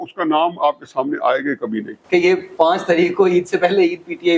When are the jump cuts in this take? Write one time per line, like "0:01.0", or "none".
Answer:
0:01.9